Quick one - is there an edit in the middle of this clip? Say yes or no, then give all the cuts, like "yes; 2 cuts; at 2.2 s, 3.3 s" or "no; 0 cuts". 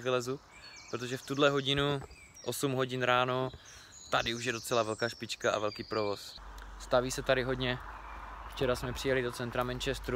yes; 1 cut; at 6.3 s